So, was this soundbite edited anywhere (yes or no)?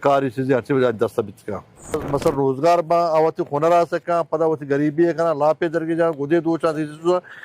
yes